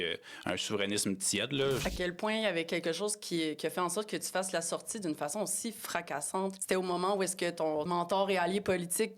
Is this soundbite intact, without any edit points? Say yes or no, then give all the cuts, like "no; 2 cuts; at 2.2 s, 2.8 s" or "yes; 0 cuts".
no; 3 cuts; at 1.8 s, 6.6 s, 7.9 s